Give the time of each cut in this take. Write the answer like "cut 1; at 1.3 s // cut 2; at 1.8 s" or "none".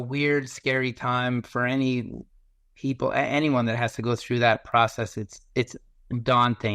none